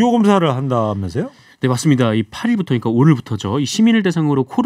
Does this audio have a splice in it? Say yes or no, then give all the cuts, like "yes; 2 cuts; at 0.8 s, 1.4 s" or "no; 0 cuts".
no; 0 cuts